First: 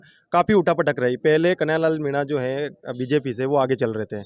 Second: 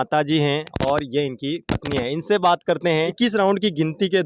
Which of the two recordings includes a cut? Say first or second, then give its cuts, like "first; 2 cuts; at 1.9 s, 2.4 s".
second; 1 cut; at 3.0 s